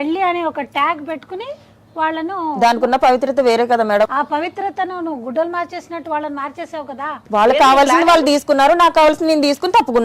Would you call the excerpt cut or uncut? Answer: cut